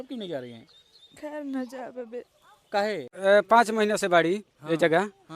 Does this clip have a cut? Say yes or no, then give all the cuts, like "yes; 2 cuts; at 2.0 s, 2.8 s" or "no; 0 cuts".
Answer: yes; 1 cut; at 3.1 s